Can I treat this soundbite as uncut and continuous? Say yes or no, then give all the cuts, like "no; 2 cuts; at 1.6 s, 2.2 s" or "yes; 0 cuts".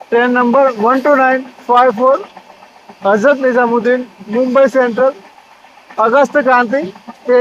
yes; 0 cuts